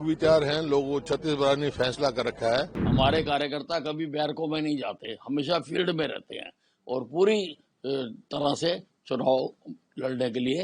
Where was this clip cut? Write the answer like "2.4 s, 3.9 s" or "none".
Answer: 2.8 s